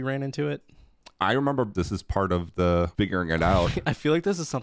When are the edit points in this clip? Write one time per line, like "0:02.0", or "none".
0:01.7
0:02.9